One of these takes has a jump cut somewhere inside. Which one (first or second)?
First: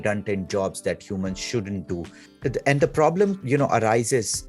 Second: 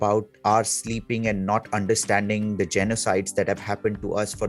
first